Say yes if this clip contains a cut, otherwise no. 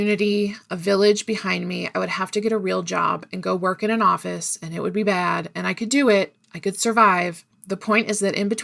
yes